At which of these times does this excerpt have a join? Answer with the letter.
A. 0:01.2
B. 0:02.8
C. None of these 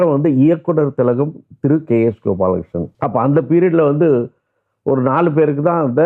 B